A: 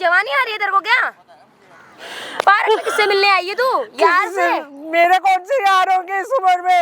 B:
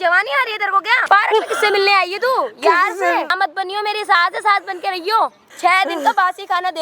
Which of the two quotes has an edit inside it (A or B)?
B